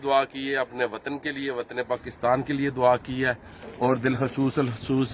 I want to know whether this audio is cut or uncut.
uncut